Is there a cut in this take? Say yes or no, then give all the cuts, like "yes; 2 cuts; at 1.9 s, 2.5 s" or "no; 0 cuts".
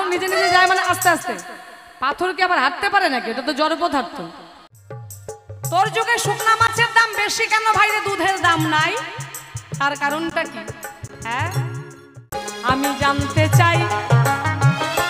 yes; 2 cuts; at 4.6 s, 12.5 s